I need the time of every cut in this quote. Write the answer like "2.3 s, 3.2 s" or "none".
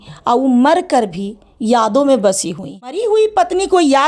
2.9 s